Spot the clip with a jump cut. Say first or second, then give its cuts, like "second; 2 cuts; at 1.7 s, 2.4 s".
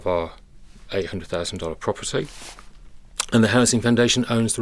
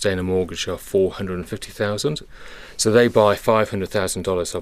second; 1 cut; at 2.2 s